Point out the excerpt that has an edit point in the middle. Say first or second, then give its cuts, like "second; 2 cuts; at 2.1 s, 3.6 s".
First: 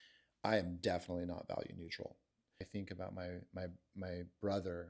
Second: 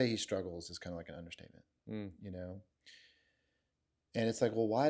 first; 1 cut; at 2.7 s